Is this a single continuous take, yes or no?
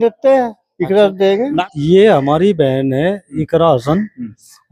no